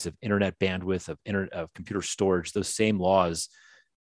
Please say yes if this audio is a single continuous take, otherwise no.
yes